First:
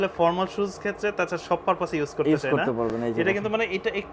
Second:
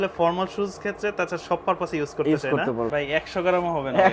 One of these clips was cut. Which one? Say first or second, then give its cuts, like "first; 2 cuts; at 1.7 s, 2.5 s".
second; 1 cut; at 2.9 s